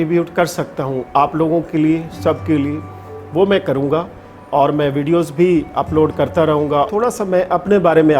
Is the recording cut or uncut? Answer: cut